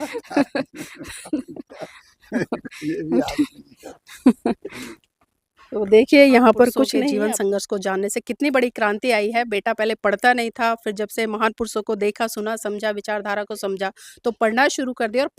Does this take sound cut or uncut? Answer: cut